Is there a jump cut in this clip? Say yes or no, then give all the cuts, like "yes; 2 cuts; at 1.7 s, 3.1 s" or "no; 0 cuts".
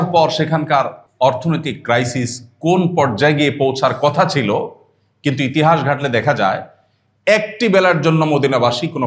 yes; 1 cut; at 1.0 s